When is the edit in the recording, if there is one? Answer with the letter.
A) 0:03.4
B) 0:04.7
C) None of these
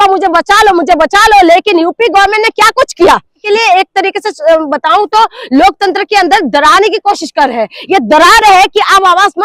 A